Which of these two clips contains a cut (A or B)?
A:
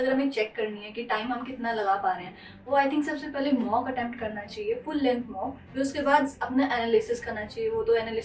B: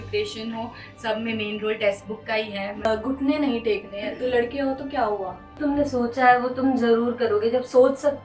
B